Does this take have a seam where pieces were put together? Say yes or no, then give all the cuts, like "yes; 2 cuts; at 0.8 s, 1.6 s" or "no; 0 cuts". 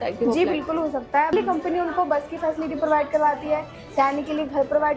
yes; 1 cut; at 1.3 s